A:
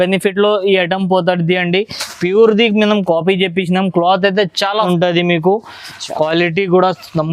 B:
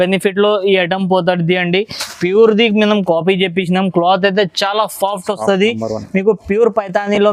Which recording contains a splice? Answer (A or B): A